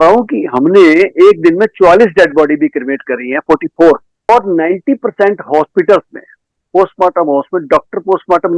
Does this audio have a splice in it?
yes; 1 cut; at 4.3 s

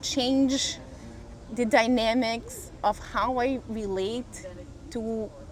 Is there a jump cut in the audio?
no; 0 cuts

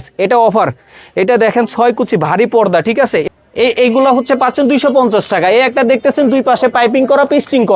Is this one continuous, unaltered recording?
no; 1 cut; at 3.2 s

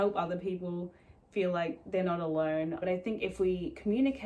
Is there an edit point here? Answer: yes; 1 cut; at 2.8 s

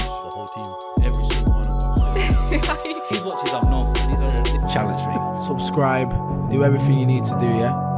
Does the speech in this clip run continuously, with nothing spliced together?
yes; 0 cuts

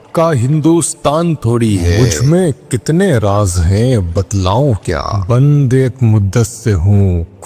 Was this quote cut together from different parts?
yes; 2 cuts; at 1.9 s, 5.1 s

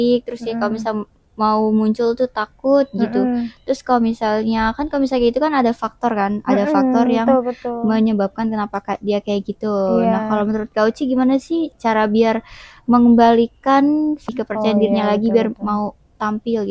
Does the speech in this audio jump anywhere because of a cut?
yes; 2 cuts; at 11.7 s, 14.3 s

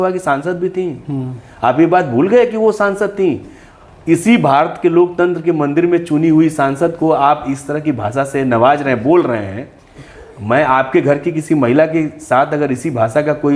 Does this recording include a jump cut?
no; 0 cuts

